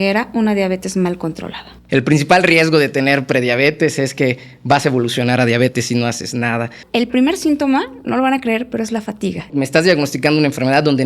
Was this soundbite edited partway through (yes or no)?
yes